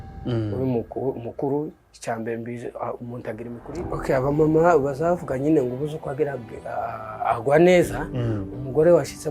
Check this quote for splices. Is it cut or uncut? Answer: cut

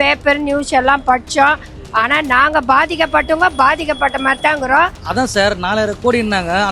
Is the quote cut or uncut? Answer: cut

